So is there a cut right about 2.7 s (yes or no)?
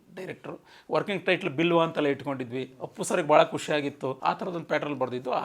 no